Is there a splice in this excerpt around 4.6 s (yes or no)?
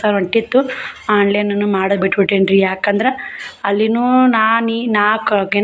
no